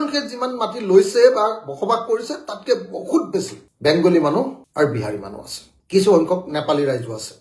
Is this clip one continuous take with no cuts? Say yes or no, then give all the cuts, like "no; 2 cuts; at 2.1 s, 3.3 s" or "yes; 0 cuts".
yes; 0 cuts